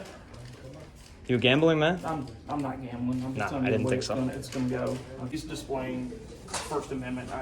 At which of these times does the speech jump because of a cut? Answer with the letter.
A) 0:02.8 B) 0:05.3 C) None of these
B